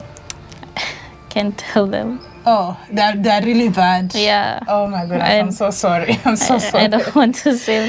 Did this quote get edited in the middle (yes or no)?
no